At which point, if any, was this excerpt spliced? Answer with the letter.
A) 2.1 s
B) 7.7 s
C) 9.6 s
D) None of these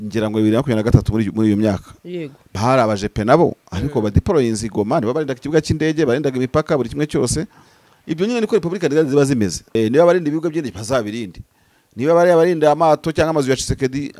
C